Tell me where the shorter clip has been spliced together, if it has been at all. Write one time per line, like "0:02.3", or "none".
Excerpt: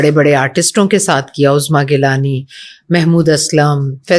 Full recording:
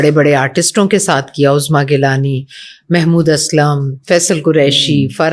none